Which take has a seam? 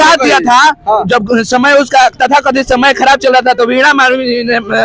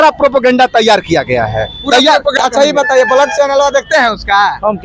second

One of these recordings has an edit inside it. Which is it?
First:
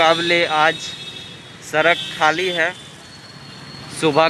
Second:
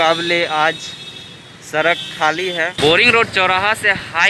second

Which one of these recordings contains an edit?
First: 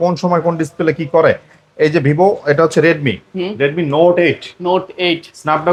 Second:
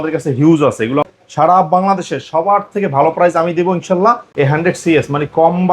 second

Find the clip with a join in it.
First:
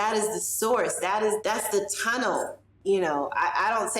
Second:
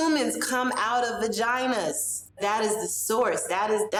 first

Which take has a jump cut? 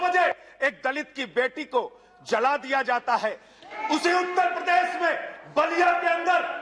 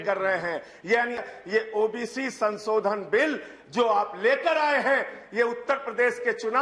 second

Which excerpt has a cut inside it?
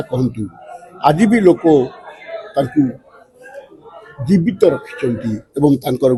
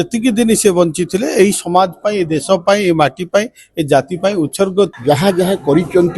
second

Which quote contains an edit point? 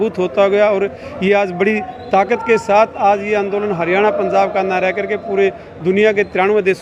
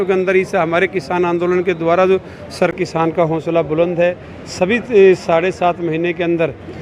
second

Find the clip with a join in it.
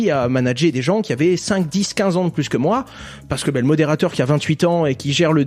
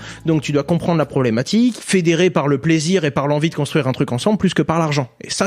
second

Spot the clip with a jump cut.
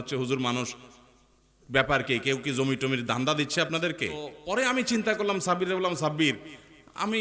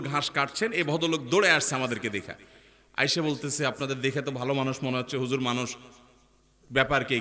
first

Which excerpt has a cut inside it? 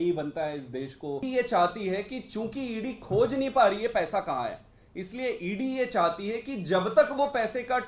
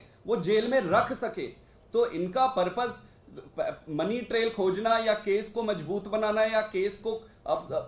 first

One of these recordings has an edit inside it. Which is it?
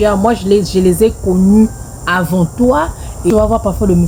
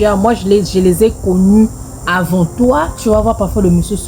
second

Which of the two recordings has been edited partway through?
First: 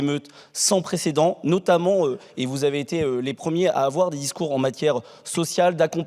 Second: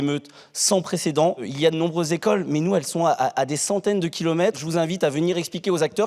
second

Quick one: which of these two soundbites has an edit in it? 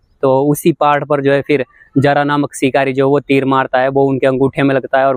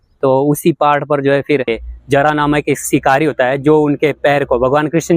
second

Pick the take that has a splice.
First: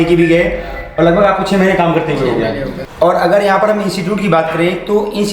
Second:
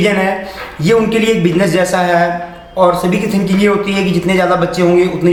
first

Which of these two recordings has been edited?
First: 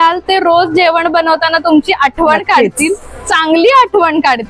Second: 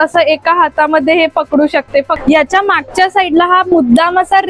second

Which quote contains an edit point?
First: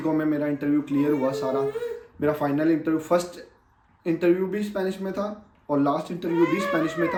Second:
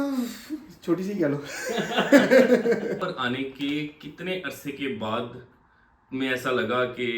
second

